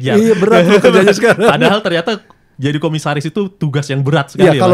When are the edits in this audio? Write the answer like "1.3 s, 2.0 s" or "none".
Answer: none